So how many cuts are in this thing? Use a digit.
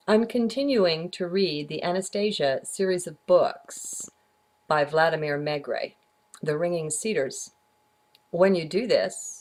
0